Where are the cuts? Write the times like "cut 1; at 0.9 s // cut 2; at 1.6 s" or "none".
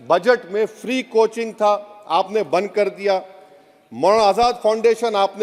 none